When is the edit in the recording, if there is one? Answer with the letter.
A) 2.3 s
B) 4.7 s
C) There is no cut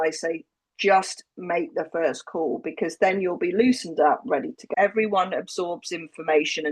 B